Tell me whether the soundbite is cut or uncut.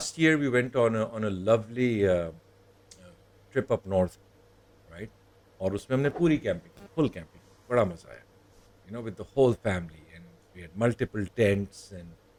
uncut